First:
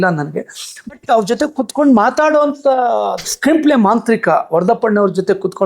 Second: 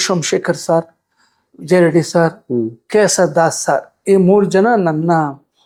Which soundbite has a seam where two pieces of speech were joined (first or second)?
first